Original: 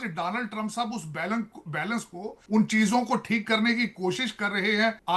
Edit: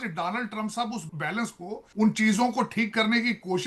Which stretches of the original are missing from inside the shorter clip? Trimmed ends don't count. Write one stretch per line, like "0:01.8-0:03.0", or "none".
0:01.1-0:01.6